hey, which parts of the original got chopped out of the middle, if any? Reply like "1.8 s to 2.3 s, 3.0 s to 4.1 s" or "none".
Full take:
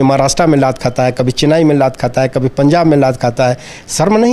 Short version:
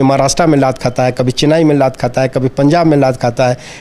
none